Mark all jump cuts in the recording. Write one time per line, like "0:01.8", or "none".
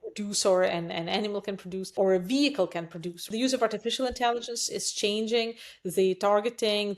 0:01.9
0:03.2